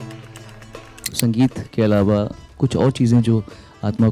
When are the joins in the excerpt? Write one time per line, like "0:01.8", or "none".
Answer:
0:01.1